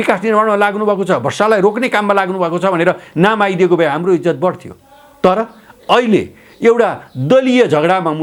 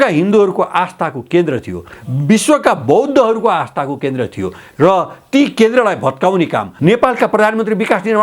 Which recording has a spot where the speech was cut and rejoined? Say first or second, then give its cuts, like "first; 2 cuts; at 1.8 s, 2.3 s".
second; 1 cut; at 6.7 s